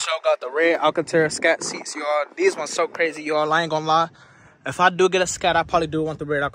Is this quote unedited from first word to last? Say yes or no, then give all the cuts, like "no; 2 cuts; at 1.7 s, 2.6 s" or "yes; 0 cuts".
yes; 0 cuts